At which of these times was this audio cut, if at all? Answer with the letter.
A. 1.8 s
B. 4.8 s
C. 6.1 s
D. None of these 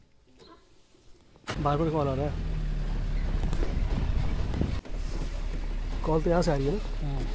B